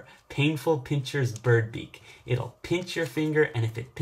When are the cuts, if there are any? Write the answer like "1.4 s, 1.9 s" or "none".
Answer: none

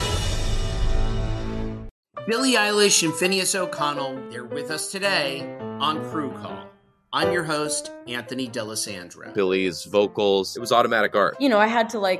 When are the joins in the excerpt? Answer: 1.9 s

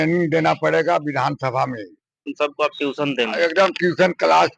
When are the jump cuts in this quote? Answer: 2.3 s

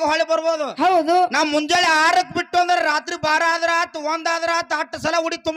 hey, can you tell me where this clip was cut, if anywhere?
none

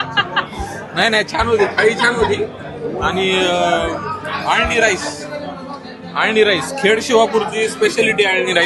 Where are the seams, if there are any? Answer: none

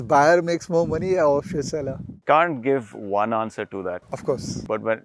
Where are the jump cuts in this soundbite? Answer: 2.1 s

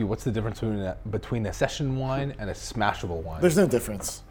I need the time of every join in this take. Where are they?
1.5 s

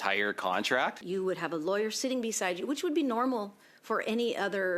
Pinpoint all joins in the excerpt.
1.0 s

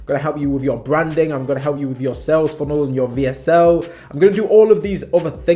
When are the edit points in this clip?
none

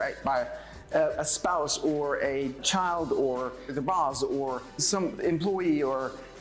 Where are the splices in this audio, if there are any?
2.6 s, 3.7 s, 5.0 s

